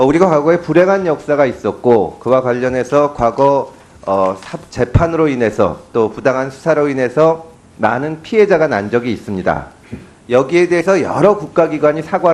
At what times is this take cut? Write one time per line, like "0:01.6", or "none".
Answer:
none